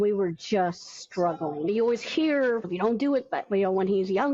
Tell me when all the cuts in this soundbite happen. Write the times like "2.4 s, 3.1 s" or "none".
1.7 s, 2.7 s